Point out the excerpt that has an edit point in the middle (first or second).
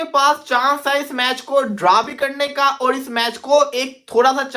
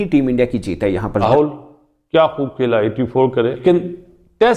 second